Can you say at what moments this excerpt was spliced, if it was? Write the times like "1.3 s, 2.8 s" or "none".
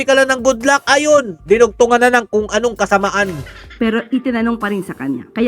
none

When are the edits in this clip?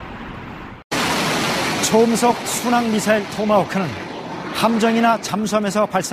0.9 s

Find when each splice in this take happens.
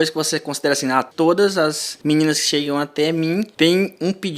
1.1 s, 1.9 s, 3.5 s

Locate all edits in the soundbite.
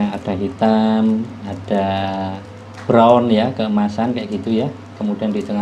none

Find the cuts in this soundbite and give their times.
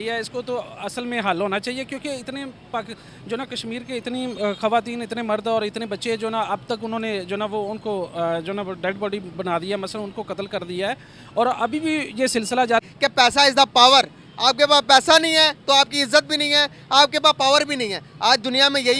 12.8 s

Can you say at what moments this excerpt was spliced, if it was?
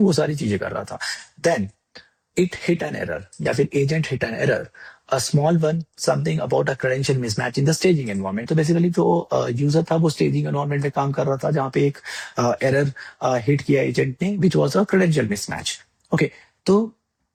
none

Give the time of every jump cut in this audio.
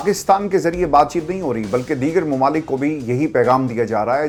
none

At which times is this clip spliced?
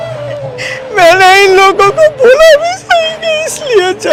none

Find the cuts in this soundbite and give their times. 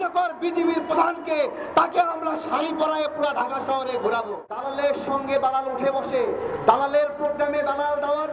4.6 s

